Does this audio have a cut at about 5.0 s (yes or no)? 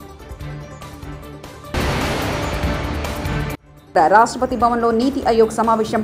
no